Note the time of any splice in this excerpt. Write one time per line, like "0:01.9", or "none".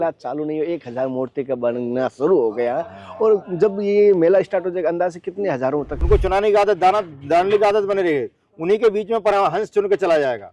0:05.9